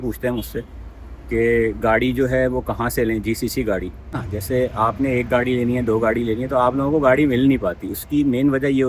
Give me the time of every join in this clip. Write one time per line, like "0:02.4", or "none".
0:04.3